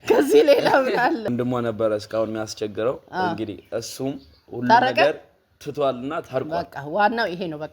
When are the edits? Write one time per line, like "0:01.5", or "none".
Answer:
0:01.3